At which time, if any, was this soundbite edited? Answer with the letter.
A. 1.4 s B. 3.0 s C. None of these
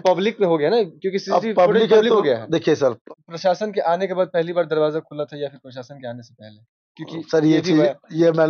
B